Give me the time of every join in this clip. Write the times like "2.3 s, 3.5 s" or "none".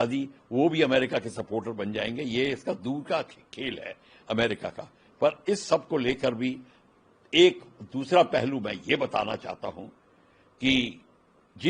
none